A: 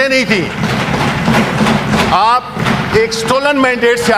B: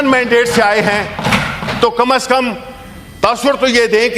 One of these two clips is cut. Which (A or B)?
A